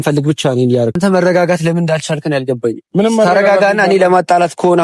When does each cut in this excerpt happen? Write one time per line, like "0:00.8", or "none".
0:01.0